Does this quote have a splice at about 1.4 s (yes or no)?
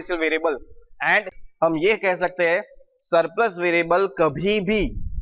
yes